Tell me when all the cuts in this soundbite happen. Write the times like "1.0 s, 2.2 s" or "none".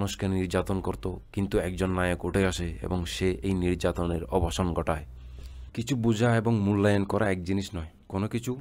1.2 s, 5.7 s